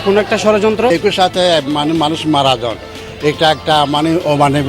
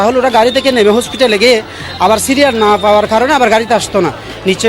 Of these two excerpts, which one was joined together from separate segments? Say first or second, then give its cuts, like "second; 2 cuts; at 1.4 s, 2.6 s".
first; 1 cut; at 0.9 s